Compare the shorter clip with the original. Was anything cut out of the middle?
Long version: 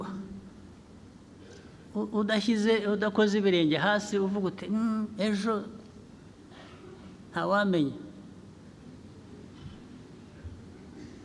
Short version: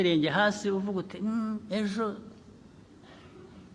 no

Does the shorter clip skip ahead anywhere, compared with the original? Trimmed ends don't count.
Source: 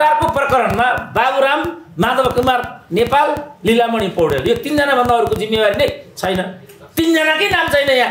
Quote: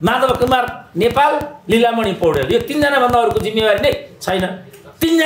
no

